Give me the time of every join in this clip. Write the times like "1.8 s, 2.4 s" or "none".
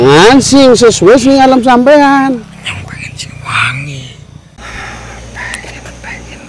4.5 s